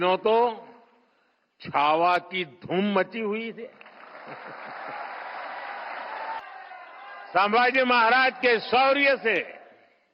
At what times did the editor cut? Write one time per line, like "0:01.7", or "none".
0:07.2